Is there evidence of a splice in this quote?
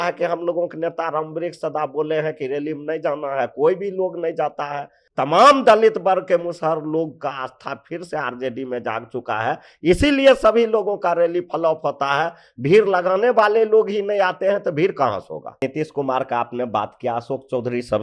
yes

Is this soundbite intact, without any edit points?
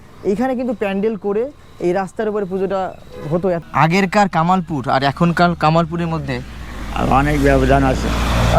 no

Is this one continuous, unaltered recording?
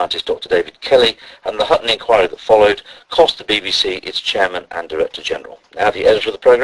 no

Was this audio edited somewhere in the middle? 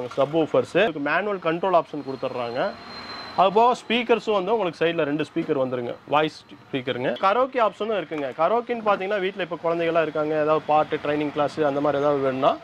yes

